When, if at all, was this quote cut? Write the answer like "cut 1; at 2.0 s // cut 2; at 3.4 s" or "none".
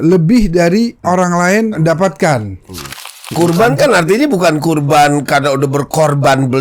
cut 1; at 1.0 s // cut 2; at 1.8 s // cut 3; at 3.2 s